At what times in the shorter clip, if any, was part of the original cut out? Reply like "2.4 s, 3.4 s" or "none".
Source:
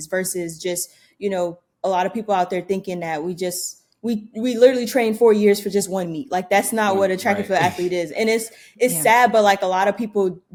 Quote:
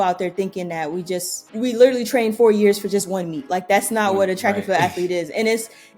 1.5 s